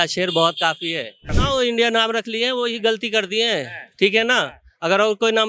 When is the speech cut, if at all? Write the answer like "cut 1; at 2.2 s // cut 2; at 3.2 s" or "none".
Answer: cut 1; at 1.3 s